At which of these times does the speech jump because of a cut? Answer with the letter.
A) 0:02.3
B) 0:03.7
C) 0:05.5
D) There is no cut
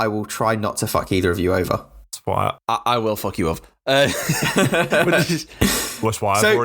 A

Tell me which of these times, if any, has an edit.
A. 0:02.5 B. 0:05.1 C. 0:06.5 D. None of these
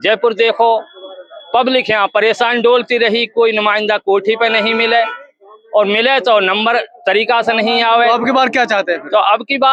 D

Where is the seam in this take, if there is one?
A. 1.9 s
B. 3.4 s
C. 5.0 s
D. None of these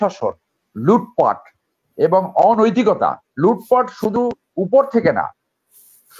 D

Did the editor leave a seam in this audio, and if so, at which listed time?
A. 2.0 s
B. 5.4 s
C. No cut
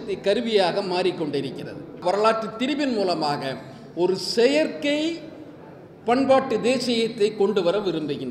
A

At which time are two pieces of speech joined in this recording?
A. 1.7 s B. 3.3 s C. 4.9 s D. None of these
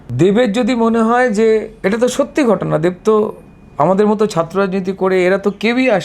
A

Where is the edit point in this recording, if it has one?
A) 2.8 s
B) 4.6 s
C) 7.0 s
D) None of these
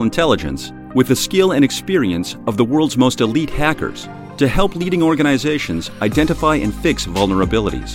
D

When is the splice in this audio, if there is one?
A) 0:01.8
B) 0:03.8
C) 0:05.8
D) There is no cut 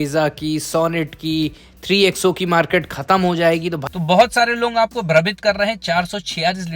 B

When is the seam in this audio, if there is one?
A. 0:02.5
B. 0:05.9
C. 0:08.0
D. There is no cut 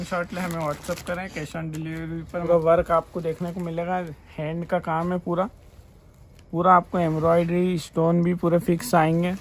A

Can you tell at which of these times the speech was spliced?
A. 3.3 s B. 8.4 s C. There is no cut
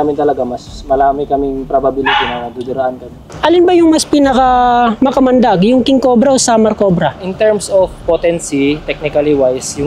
A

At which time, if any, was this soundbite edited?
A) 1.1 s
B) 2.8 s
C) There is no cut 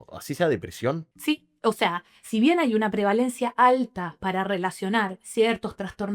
A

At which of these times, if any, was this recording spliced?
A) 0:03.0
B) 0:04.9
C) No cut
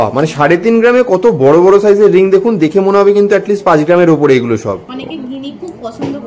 B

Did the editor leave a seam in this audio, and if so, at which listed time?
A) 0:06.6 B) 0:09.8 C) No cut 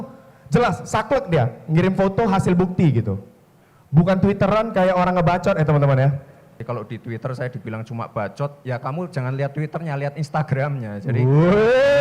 A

